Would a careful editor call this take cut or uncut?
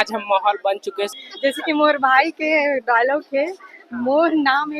cut